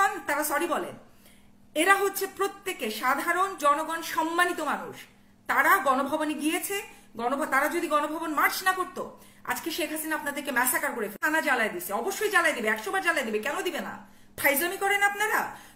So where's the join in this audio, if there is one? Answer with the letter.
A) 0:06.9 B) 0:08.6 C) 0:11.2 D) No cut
C